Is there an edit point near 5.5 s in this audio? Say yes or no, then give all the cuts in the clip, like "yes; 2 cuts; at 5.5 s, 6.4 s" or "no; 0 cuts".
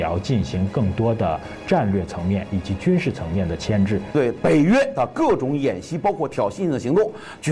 no; 1 cut; at 4.1 s